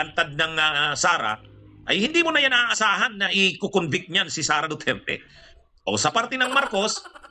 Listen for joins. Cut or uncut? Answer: uncut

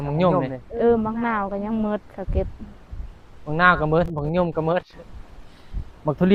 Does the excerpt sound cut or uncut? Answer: uncut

